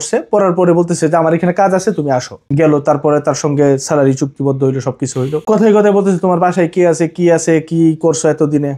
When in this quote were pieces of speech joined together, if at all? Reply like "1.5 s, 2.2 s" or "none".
2.4 s, 5.4 s